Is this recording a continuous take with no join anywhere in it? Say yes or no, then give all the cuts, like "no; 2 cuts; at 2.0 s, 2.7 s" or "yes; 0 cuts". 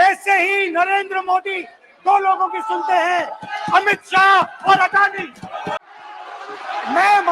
no; 1 cut; at 5.8 s